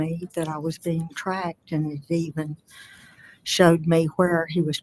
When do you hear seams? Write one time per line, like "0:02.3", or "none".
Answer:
none

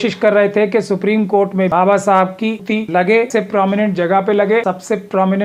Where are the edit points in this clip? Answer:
0:01.7
0:02.7
0:03.3
0:04.6

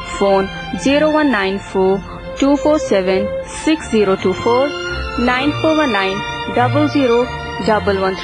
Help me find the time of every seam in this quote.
none

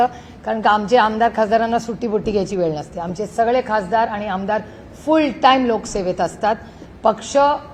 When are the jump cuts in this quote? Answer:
none

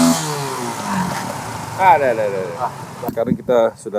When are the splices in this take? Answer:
0:03.1

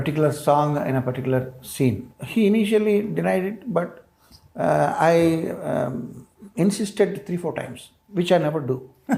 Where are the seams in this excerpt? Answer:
none

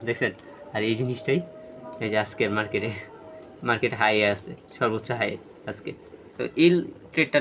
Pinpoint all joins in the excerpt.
0:06.3

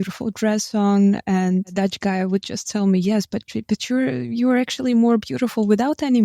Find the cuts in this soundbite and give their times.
0:01.7

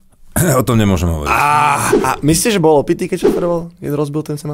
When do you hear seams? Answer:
0:01.9

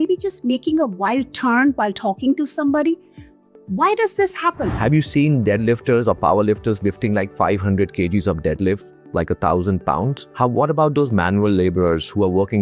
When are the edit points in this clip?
0:04.7

